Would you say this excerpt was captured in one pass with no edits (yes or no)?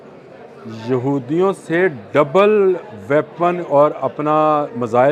yes